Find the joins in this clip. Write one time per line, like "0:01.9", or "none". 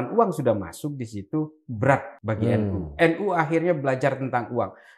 0:02.1